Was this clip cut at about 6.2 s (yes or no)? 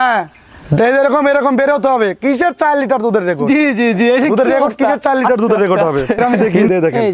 yes